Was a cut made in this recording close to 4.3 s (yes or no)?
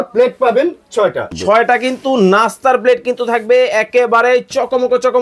no